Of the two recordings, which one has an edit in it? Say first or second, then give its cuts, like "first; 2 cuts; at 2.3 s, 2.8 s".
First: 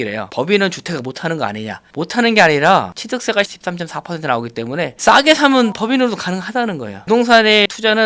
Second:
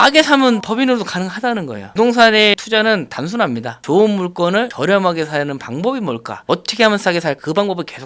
second; 1 cut; at 6.4 s